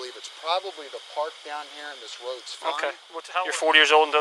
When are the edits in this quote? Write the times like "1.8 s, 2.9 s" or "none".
3.1 s